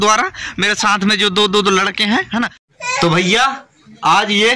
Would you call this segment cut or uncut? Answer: cut